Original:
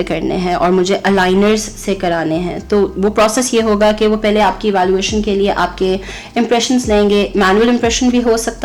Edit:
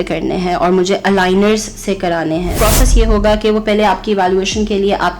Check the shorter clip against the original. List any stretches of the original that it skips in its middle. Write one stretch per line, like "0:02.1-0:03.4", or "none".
0:02.6-0:03.1